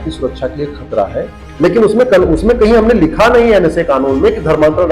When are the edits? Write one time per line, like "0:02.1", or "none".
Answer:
0:01.4